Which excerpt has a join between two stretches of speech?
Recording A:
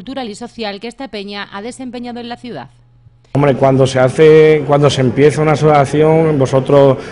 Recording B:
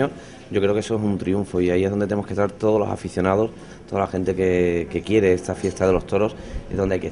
A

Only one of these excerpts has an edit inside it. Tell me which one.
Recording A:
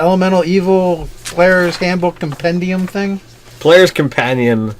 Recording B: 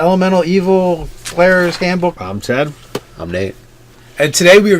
A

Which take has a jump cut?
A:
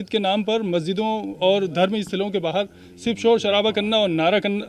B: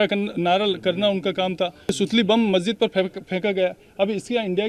B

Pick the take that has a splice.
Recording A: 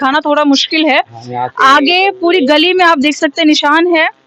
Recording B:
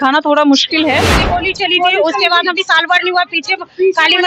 B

